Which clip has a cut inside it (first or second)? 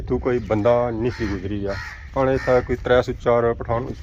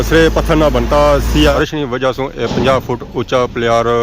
second